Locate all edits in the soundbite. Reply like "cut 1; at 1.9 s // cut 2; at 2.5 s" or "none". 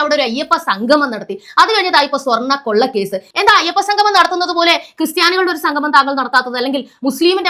cut 1; at 3.2 s